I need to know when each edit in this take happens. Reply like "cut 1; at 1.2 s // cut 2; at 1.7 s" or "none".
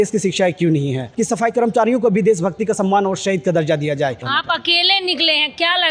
cut 1; at 1.1 s // cut 2; at 4.3 s